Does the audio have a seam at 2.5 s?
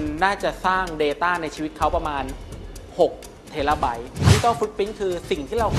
no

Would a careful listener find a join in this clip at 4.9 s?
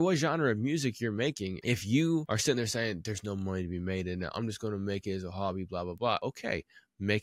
no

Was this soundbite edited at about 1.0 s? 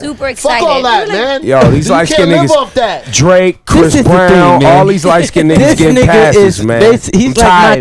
yes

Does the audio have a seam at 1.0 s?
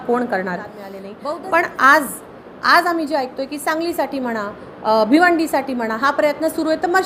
yes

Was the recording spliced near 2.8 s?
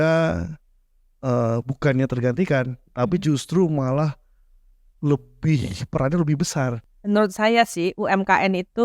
no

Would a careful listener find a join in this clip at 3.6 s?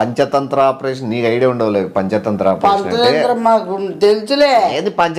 no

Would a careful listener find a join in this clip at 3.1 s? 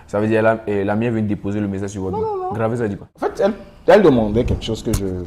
yes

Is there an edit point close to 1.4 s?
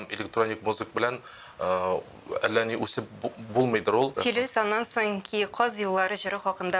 no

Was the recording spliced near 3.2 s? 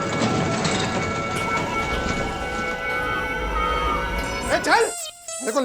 no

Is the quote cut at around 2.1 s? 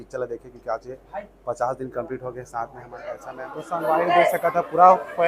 no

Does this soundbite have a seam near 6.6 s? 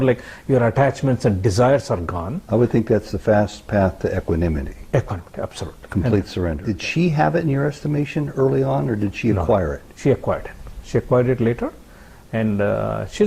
yes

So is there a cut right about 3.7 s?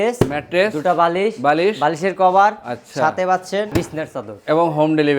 yes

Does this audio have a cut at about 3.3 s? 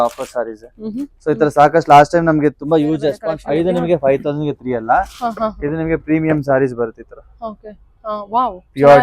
yes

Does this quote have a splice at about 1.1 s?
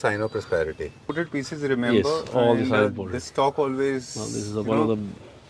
yes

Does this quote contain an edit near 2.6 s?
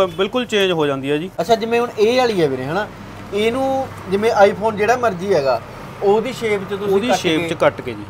no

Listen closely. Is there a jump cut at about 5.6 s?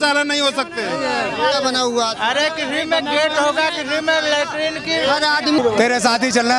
yes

